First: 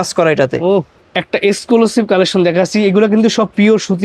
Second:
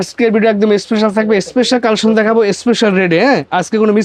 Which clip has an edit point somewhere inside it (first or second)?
first